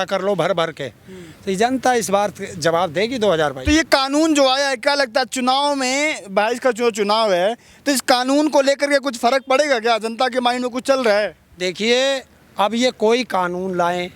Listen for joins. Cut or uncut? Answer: uncut